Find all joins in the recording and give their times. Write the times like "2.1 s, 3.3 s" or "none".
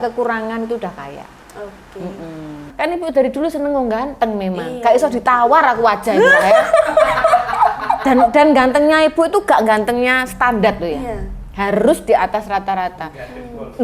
2.7 s